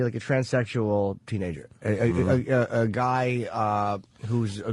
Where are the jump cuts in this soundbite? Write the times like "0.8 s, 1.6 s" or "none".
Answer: 2.4 s